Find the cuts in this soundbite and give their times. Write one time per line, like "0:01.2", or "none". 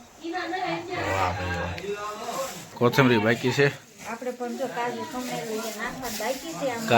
0:02.7